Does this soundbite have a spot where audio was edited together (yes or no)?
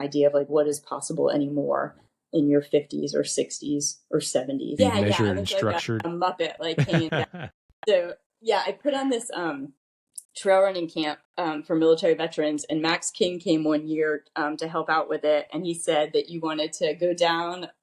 yes